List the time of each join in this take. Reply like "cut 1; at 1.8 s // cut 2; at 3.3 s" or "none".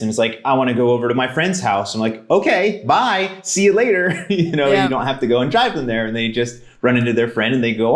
none